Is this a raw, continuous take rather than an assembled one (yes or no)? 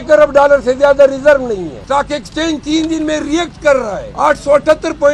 no